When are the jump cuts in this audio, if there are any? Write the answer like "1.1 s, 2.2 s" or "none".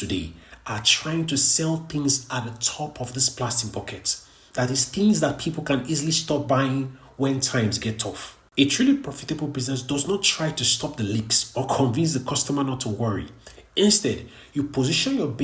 none